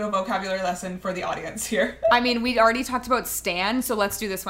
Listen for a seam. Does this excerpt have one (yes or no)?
no